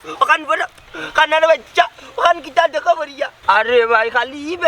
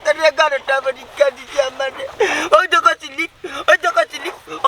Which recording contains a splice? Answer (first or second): first